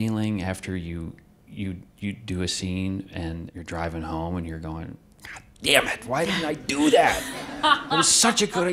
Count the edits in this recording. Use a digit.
1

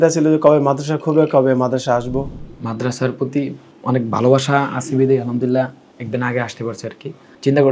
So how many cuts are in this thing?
1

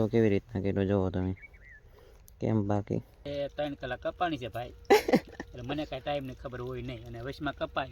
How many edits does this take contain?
1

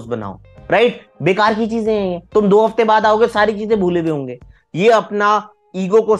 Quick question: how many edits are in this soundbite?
2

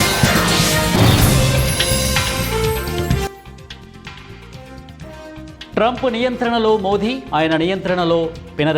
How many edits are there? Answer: 1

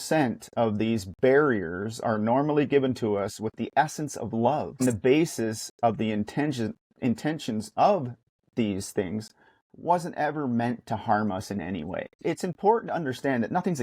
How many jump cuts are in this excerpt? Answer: 2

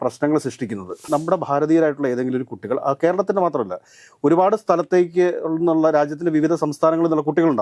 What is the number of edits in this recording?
1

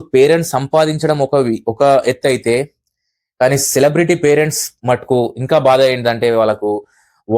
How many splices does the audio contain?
0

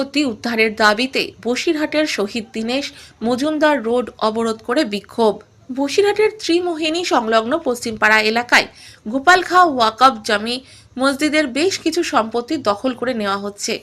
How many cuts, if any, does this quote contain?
0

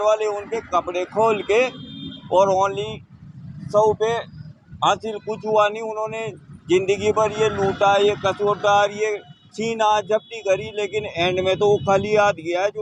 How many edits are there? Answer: 0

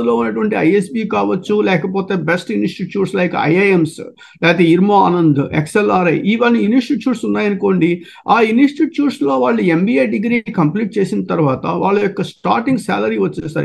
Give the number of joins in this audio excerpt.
0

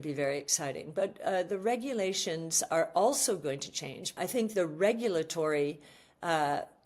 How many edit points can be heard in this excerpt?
1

